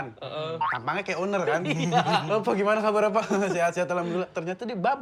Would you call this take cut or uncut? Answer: uncut